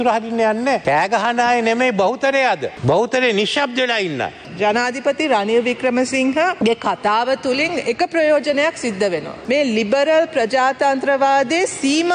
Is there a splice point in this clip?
yes; 5 cuts; at 0.8 s, 2.7 s, 4.5 s, 6.6 s, 9.3 s

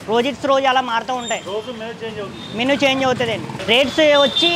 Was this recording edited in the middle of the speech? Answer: yes; 1 cut; at 3.5 s

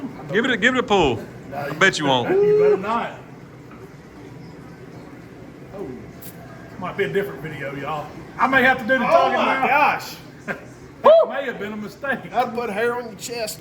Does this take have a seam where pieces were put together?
no; 0 cuts

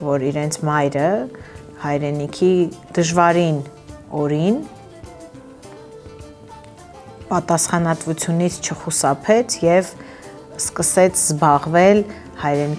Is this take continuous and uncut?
yes; 0 cuts

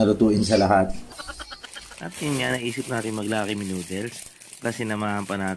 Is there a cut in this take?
yes; 1 cut; at 1.0 s

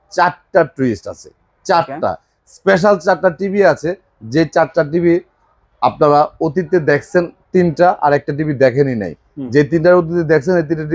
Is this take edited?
no; 0 cuts

